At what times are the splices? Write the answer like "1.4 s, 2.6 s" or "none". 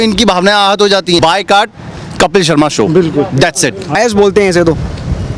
1.2 s, 3.9 s